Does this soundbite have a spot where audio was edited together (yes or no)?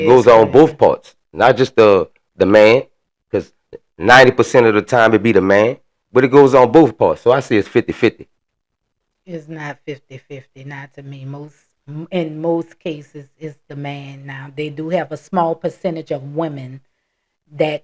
no